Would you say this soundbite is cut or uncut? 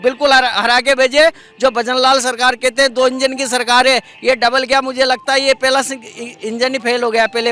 uncut